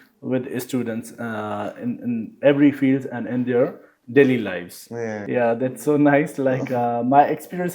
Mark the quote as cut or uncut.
cut